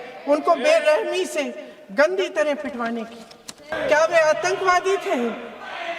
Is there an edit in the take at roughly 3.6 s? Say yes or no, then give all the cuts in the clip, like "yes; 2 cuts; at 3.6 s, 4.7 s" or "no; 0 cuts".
yes; 1 cut; at 3.6 s